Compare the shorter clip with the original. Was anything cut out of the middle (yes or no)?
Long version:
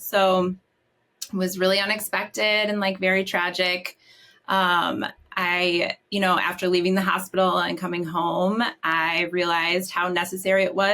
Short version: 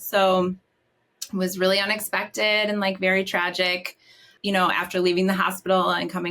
yes